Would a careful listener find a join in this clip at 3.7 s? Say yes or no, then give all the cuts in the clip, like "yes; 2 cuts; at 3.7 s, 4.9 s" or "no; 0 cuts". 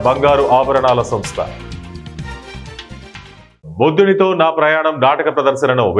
yes; 1 cut; at 3.7 s